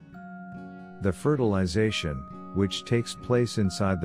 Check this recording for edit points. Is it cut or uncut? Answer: cut